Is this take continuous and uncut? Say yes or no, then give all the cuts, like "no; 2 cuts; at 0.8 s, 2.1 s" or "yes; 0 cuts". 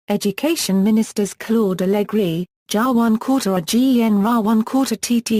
yes; 0 cuts